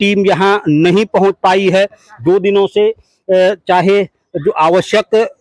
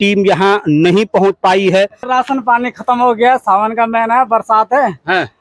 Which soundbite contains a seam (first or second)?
second